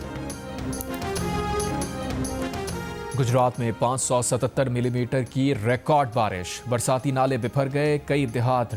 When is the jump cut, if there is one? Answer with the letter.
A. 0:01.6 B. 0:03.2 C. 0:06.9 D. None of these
A